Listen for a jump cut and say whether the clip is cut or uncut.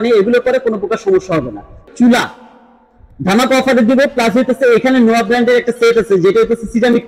cut